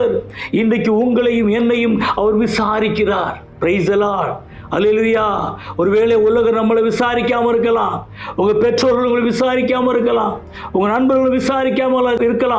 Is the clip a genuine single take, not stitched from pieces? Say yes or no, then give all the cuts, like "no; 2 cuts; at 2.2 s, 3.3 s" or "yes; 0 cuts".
no; 1 cut; at 3.4 s